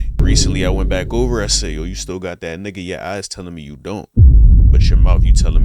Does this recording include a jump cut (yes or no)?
no